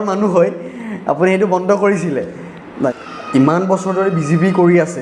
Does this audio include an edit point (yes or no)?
yes